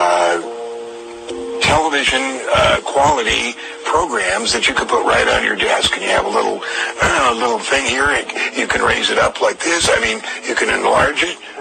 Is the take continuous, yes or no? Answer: no